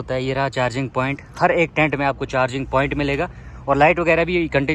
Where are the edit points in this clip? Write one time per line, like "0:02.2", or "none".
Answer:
none